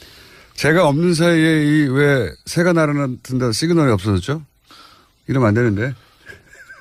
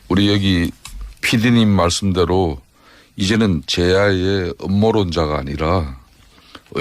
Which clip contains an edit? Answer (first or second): second